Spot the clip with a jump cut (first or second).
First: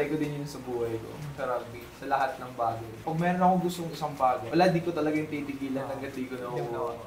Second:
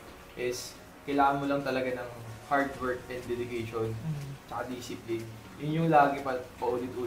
first